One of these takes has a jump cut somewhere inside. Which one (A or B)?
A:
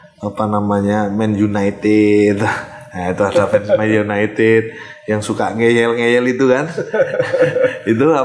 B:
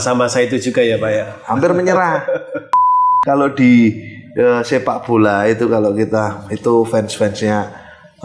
B